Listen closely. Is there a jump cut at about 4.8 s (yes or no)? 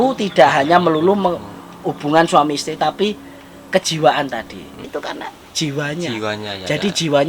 yes